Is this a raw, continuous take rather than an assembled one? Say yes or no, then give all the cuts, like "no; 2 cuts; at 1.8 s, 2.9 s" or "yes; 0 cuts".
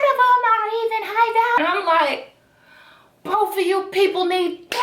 no; 1 cut; at 1.6 s